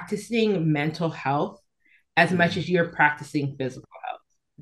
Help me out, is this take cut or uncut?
uncut